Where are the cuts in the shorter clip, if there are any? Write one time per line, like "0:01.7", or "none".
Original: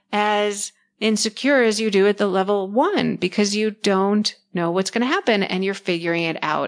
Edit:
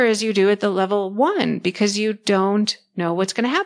none